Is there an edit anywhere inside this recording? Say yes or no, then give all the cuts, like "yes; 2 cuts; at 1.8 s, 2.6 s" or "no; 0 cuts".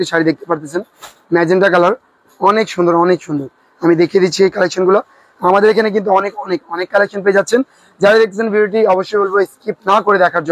no; 0 cuts